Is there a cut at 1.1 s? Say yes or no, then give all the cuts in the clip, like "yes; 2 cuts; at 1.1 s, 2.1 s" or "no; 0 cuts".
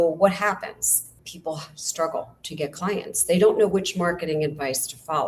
yes; 1 cut; at 1.1 s